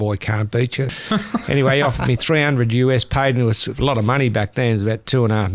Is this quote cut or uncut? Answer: cut